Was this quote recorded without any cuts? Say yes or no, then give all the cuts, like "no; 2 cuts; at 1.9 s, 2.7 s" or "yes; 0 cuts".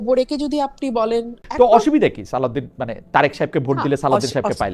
no; 1 cut; at 1.4 s